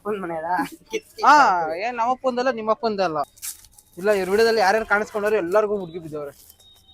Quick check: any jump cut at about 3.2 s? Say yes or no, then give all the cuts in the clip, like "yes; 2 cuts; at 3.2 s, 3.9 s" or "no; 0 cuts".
yes; 1 cut; at 3.2 s